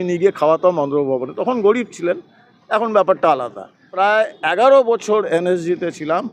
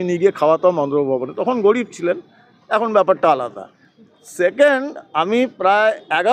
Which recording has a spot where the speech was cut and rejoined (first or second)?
first